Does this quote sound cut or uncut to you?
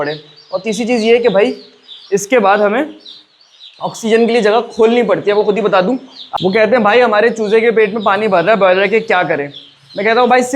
cut